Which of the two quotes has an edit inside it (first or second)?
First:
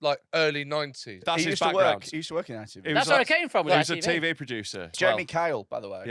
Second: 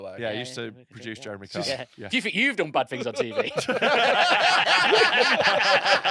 first